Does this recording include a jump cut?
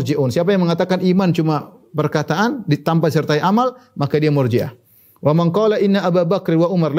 no; 0 cuts

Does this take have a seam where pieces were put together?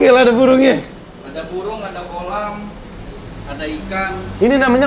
no; 0 cuts

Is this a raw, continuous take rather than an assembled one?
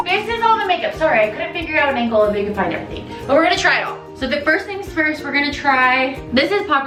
yes; 0 cuts

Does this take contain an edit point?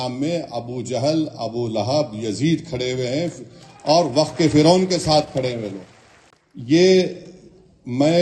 no; 0 cuts

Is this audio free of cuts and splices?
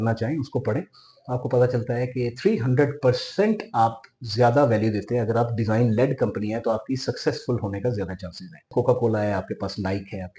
no; 1 cut; at 8.6 s

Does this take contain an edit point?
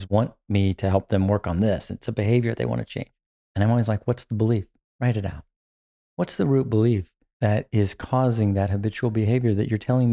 yes; 1 cut; at 4.8 s

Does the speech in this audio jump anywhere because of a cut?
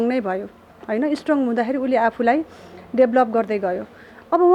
no; 0 cuts

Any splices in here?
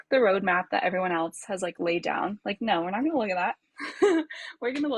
no; 0 cuts

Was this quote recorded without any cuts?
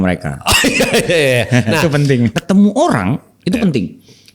no; 1 cut; at 2.3 s

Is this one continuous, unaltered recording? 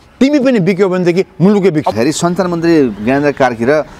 no; 1 cut; at 1.9 s

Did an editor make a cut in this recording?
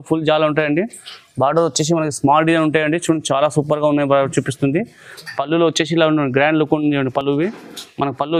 no; 0 cuts

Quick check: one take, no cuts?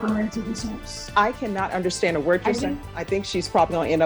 no; 1 cut; at 2.8 s

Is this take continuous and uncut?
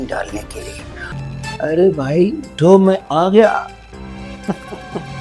no; 1 cut; at 1.1 s

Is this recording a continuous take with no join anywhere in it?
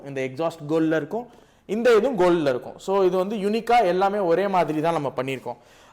yes; 0 cuts

